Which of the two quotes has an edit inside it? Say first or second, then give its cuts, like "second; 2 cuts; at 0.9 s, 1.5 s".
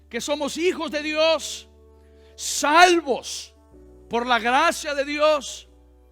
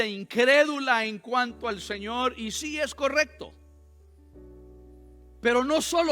second; 2 cuts; at 3.5 s, 5.1 s